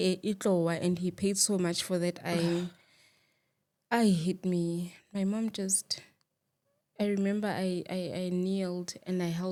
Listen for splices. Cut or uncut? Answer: uncut